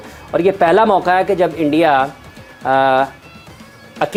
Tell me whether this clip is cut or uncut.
uncut